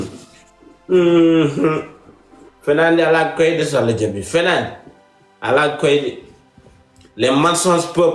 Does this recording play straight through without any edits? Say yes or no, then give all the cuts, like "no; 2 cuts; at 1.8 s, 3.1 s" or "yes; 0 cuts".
yes; 0 cuts